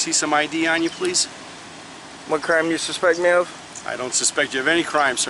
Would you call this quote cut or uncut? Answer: uncut